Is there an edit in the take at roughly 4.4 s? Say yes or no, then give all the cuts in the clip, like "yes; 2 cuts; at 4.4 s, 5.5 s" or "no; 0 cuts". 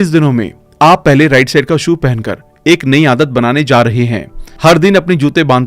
no; 0 cuts